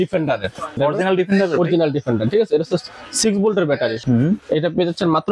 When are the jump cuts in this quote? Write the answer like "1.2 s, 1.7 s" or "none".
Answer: 0.7 s, 4.0 s